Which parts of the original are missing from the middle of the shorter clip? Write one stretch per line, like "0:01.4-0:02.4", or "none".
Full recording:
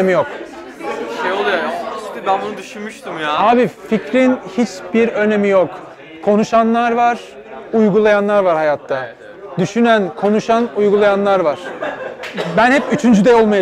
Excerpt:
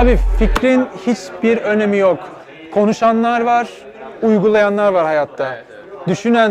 none